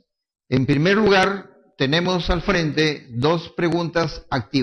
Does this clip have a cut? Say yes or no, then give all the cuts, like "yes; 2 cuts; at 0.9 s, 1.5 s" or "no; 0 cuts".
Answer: no; 0 cuts